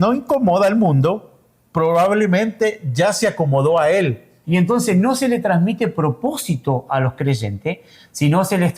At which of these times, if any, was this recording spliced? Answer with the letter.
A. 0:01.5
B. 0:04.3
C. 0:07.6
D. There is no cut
B